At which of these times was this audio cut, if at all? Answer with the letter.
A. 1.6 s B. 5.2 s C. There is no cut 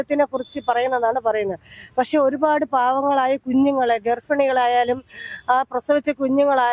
C